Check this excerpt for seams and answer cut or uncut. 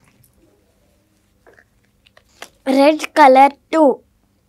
cut